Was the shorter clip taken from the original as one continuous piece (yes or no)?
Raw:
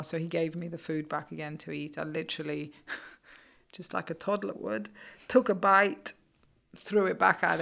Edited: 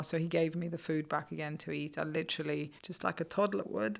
no